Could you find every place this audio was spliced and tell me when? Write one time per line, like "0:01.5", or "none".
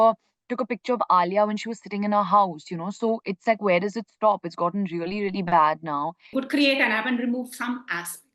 0:06.3